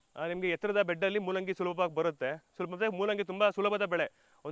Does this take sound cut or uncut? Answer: uncut